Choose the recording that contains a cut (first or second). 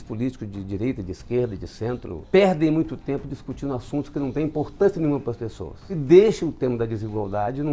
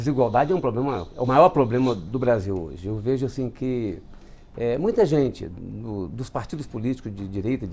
first